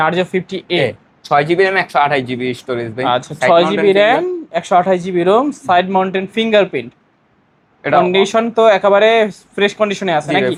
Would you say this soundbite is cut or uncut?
uncut